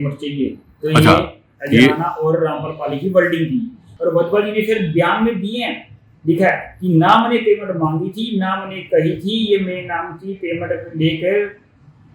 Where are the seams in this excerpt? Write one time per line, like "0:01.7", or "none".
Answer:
0:03.8